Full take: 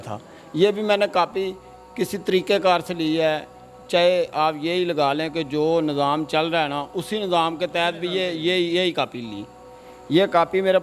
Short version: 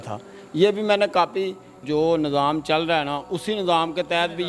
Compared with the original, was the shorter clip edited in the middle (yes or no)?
yes